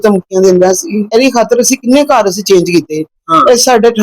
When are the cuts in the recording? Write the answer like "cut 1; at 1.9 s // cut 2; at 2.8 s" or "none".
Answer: cut 1; at 1.1 s